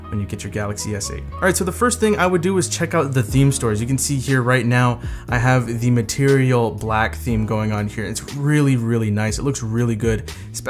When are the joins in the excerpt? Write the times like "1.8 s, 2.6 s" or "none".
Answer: 7.2 s